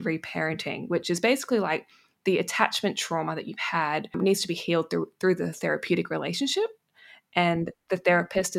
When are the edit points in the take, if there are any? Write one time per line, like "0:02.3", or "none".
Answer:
0:04.1